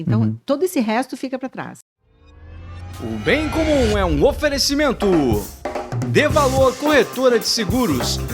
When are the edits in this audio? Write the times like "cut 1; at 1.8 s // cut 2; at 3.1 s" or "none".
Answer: cut 1; at 1.7 s